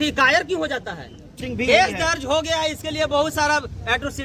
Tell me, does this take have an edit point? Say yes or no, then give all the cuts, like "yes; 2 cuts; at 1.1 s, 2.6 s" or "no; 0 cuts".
yes; 1 cut; at 1.4 s